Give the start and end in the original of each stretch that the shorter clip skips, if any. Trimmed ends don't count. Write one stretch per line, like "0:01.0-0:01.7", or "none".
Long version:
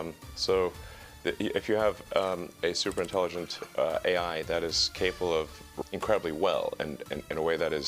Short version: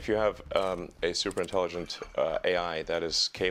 none